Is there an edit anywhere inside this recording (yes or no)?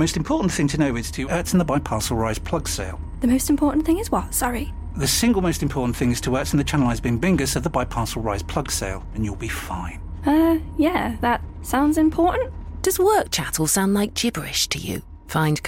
no